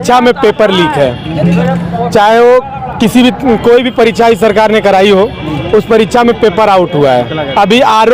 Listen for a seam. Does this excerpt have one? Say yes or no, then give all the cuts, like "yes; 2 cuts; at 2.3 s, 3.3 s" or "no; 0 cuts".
no; 0 cuts